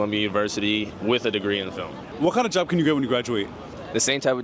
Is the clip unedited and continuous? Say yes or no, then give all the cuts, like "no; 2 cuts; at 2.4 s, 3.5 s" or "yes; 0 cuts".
yes; 0 cuts